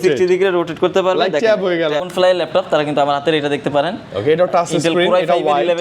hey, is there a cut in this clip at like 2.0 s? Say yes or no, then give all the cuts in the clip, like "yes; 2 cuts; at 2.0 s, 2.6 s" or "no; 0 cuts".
yes; 1 cut; at 2.0 s